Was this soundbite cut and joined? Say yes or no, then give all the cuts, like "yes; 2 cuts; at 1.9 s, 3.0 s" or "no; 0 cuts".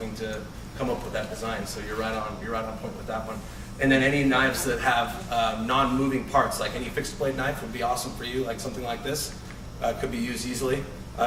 no; 0 cuts